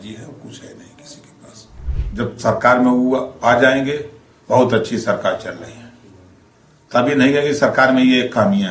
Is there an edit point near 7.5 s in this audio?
no; 1 cut; at 1.8 s

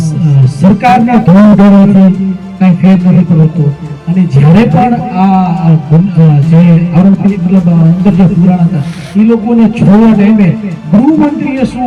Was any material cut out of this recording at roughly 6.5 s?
no; 0 cuts

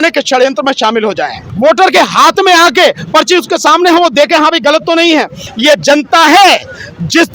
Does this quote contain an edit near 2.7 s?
no; 2 cuts; at 1.5 s, 5.4 s

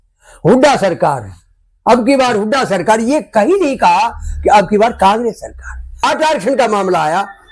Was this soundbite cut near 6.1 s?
yes; 1 cut; at 6.1 s

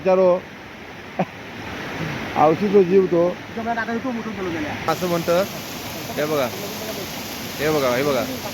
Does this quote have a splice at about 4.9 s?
yes; 1 cut; at 4.9 s

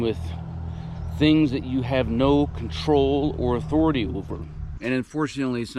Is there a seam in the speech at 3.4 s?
no; 1 cut; at 4.7 s

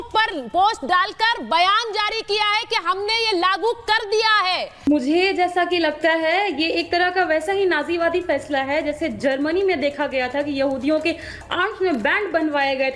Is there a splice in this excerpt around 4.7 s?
yes; 1 cut; at 4.7 s

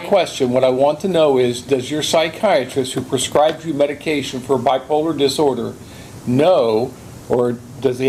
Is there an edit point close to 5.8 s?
no; 0 cuts

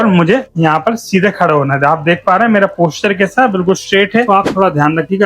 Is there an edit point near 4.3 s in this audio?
yes; 1 cut; at 4.3 s

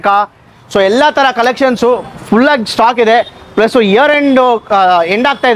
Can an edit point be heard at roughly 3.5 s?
no; 0 cuts

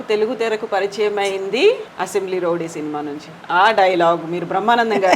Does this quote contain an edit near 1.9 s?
yes; 1 cut; at 1.9 s

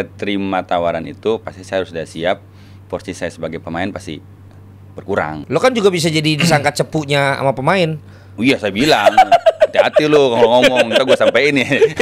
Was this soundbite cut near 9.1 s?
no; 1 cut; at 5.4 s

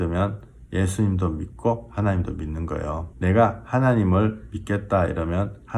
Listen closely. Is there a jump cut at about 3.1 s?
yes; 1 cut; at 3.1 s

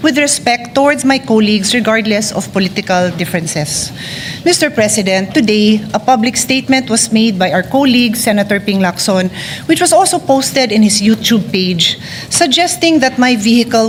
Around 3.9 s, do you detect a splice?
no; 0 cuts

